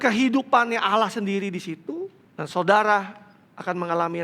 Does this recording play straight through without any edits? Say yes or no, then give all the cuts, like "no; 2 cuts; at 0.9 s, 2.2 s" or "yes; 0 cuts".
no; 1 cut; at 2.2 s